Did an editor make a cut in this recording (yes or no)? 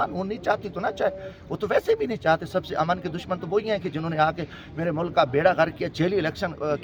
no